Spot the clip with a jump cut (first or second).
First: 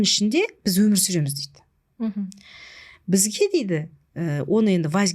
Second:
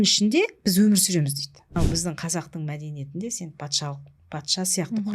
second